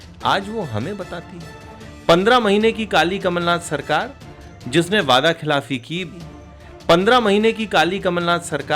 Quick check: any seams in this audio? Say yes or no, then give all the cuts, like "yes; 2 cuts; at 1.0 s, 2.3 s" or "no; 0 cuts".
yes; 1 cut; at 6.2 s